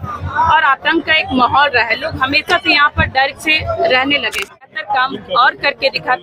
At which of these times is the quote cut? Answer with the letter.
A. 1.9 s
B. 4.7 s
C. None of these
B